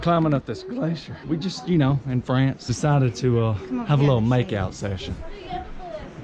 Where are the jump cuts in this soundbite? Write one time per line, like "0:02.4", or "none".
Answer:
0:01.1
0:02.7